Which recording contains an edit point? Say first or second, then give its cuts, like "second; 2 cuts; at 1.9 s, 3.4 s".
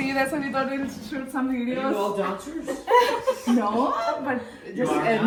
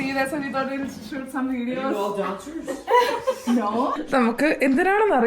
second; 1 cut; at 4.0 s